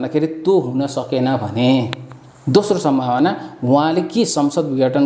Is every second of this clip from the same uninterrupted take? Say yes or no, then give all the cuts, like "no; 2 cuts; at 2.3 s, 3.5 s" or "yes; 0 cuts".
yes; 0 cuts